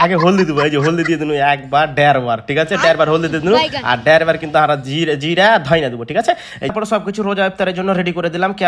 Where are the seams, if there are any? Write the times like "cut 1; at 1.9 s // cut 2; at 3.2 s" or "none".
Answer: cut 1; at 6.7 s